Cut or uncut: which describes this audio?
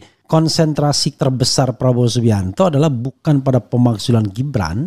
cut